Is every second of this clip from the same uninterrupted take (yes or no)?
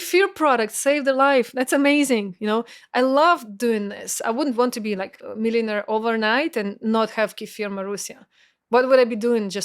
no